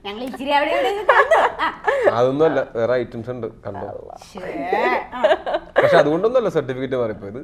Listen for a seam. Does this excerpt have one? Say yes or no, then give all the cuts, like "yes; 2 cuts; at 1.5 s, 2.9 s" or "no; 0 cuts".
no; 0 cuts